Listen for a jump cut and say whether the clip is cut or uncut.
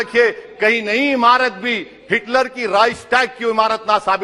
uncut